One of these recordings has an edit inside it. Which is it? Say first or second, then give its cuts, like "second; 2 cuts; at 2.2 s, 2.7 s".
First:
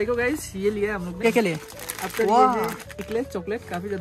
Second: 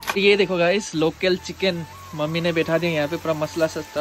first; 1 cut; at 1.2 s